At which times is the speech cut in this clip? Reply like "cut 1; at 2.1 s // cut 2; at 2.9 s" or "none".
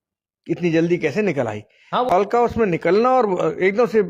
cut 1; at 2.1 s